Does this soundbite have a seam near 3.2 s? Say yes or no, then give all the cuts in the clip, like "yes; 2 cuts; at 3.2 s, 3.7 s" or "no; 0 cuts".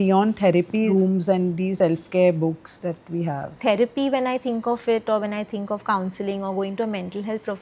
yes; 3 cuts; at 0.9 s, 1.7 s, 3.2 s